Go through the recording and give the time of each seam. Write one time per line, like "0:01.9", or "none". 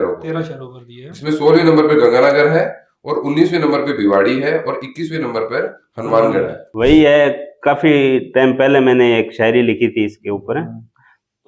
0:06.6